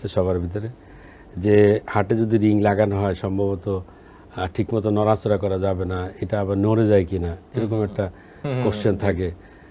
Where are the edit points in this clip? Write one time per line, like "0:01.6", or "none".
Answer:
none